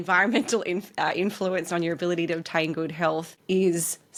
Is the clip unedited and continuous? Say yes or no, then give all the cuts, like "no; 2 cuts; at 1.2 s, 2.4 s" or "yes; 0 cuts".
yes; 0 cuts